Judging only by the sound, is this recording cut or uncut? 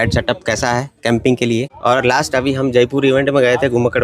cut